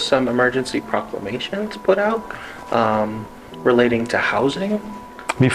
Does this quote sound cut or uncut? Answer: uncut